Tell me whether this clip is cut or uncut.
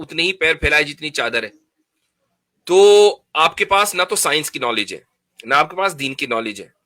uncut